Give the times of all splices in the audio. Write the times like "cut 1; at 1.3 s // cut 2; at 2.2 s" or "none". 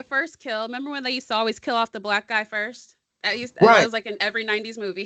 none